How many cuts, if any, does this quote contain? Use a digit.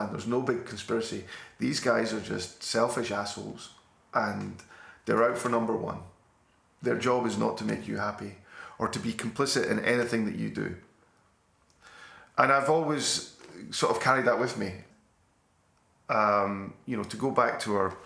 1